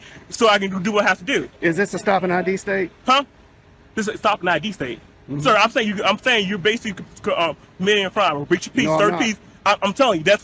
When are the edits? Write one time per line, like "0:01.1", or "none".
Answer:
none